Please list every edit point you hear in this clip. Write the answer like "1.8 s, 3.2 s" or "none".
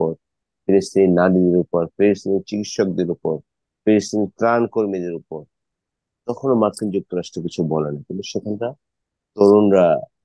none